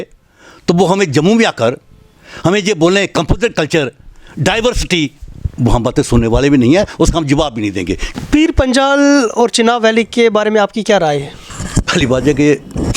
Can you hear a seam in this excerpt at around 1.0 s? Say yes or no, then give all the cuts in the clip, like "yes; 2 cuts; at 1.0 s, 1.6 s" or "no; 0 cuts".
no; 1 cut; at 8.0 s